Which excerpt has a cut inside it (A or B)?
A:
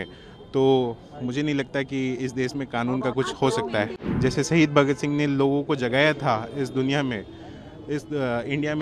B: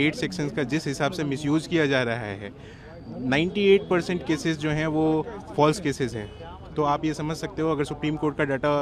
A